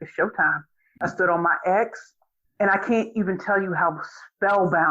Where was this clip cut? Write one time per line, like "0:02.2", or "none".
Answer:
0:01.0